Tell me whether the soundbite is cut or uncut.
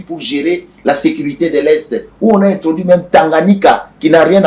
uncut